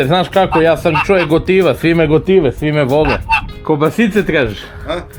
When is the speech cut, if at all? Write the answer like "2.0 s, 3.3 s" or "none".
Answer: 3.5 s